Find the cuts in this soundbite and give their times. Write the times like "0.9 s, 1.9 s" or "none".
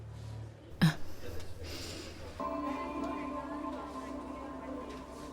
2.4 s